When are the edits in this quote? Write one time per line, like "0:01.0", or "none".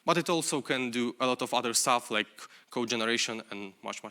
none